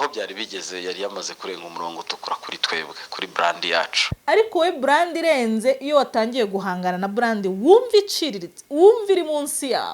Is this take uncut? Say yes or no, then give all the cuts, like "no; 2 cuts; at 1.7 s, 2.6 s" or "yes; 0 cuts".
no; 1 cut; at 4.0 s